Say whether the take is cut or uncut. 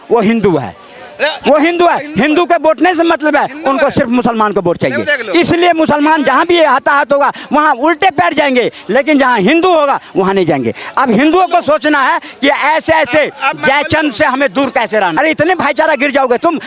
cut